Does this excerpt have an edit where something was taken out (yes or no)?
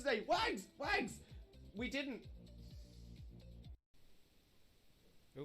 yes